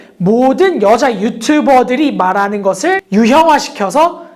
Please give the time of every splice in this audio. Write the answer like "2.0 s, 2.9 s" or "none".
3.0 s